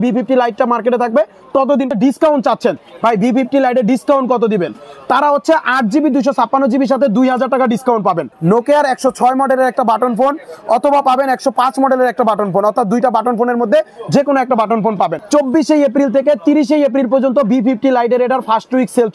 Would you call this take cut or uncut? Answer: cut